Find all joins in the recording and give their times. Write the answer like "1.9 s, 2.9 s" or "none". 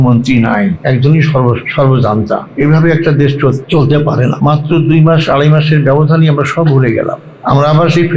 0.8 s, 1.7 s, 2.5 s, 3.6 s, 4.4 s, 7.3 s